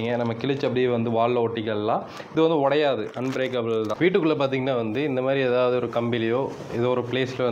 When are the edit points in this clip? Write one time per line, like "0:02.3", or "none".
0:03.9